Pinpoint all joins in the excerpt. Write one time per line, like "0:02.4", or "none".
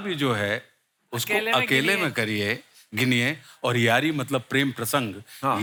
none